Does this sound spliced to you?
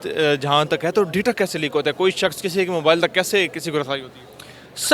no; 0 cuts

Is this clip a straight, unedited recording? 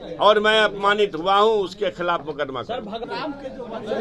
no; 1 cut; at 3.0 s

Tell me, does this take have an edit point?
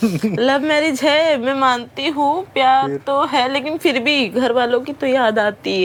no; 0 cuts

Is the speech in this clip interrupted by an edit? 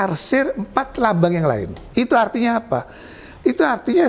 yes; 1 cut; at 1.8 s

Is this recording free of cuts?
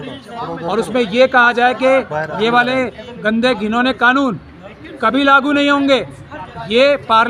yes; 0 cuts

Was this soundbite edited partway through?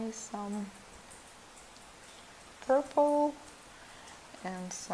yes; 1 cut; at 2.8 s

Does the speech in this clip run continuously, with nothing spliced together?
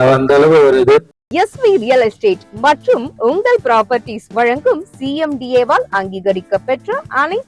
no; 1 cut; at 1.3 s

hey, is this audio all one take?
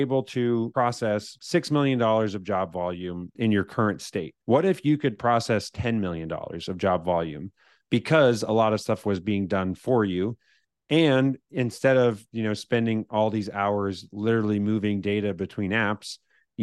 no; 3 cuts; at 0.9 s, 3.3 s, 4.3 s

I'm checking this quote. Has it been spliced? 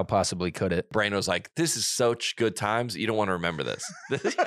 yes; 1 cut; at 0.9 s

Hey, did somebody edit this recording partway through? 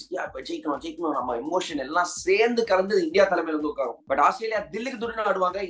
no; 0 cuts

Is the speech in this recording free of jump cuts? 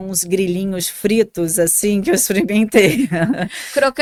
yes; 0 cuts

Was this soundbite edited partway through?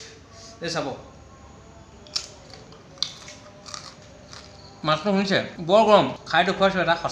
yes; 2 cuts; at 5.5 s, 6.2 s

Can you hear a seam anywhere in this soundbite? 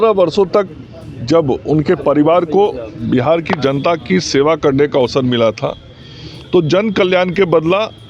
no; 0 cuts

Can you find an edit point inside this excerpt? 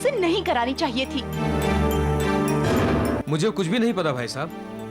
yes; 1 cut; at 3.2 s

